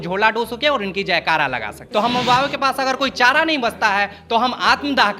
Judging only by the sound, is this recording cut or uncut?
cut